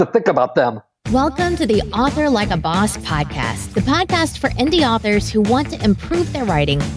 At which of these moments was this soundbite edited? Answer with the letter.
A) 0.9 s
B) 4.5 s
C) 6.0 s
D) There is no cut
A